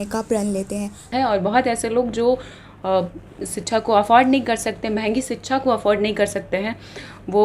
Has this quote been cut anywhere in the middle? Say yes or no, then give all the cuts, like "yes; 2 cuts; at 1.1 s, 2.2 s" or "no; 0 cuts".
yes; 1 cut; at 1.1 s